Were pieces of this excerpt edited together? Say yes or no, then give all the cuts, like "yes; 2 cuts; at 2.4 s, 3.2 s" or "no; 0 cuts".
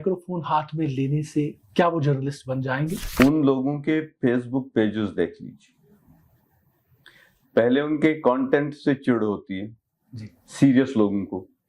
yes; 1 cut; at 3.0 s